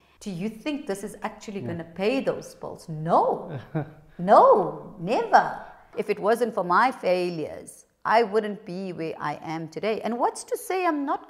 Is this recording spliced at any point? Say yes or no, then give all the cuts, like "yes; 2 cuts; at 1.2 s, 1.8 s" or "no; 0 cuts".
yes; 1 cut; at 5.9 s